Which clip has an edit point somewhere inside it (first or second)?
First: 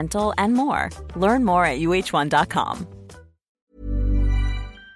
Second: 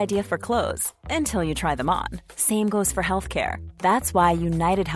first